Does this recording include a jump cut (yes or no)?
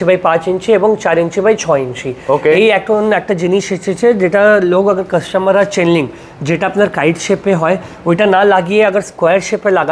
no